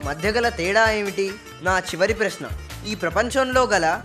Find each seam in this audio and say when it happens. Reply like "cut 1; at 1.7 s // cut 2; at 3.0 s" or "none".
cut 1; at 1.5 s

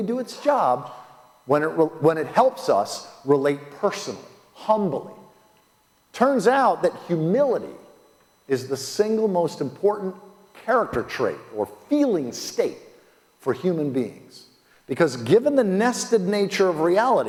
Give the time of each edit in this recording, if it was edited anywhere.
none

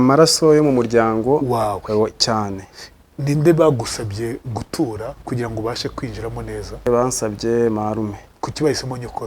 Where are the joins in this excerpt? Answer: cut 1; at 6.9 s // cut 2; at 8.3 s

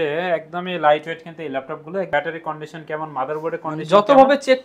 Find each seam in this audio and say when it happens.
cut 1; at 2.1 s

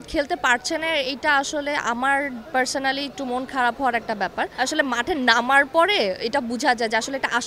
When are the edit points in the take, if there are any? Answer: cut 1; at 4.5 s

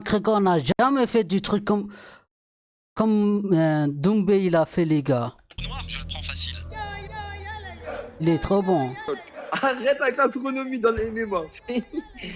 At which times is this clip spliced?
none

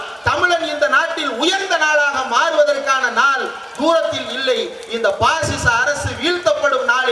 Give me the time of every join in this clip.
none

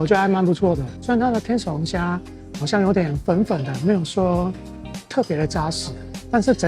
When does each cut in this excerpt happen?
cut 1; at 0.9 s

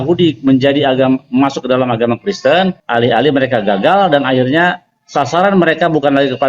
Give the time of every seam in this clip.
cut 1; at 2.8 s

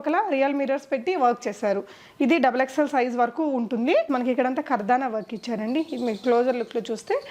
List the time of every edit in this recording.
cut 1; at 4.1 s

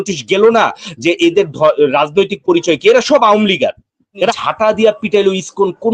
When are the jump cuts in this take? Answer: cut 1; at 4.3 s

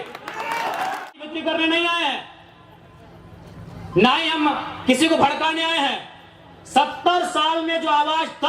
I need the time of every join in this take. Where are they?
cut 1; at 1.1 s

